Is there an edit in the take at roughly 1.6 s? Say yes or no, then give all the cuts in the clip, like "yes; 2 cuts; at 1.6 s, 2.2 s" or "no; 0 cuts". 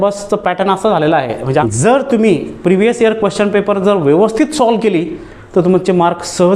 yes; 1 cut; at 1.6 s